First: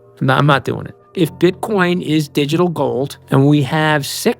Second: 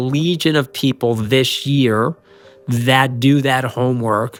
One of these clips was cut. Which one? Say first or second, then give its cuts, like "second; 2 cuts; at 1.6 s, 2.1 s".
first; 2 cuts; at 1.0 s, 3.2 s